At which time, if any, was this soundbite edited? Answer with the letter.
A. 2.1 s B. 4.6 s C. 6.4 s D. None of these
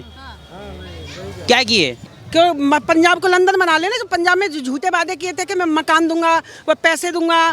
A